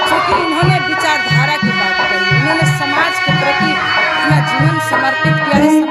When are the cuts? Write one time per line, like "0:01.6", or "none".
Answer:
none